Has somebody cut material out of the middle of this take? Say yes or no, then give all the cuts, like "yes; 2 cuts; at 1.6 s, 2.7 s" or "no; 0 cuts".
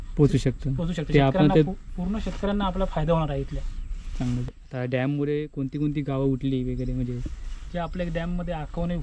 yes; 1 cut; at 4.6 s